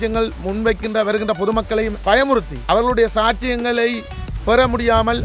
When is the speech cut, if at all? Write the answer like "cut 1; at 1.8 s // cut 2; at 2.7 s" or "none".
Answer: cut 1; at 2.0 s // cut 2; at 2.5 s